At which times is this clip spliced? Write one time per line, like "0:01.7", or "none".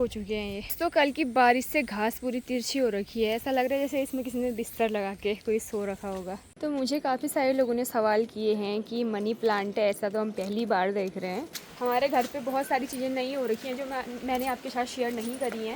0:00.7
0:06.5
0:11.5